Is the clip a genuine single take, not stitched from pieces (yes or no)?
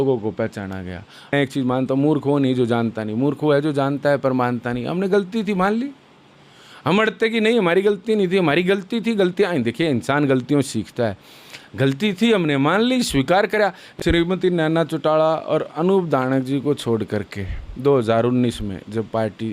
no